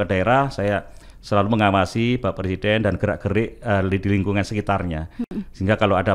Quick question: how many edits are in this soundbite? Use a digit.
0